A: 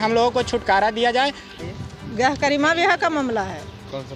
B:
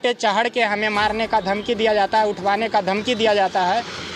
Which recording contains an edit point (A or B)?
A